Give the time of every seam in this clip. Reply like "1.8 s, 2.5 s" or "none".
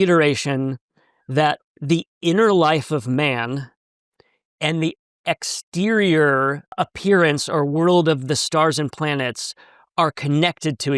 1.7 s, 6.7 s